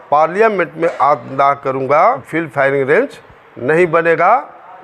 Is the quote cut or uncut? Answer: cut